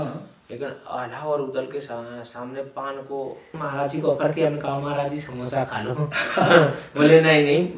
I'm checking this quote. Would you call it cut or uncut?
cut